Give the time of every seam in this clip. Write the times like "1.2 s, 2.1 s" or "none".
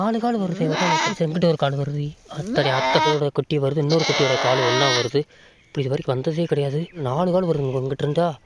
1.1 s, 3.1 s, 7.0 s